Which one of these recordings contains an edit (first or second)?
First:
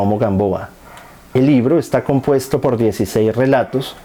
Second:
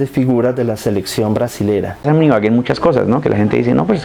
second